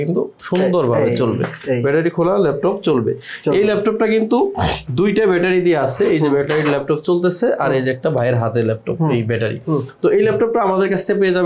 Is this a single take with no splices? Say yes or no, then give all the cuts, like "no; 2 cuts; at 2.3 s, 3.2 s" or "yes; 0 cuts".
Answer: yes; 0 cuts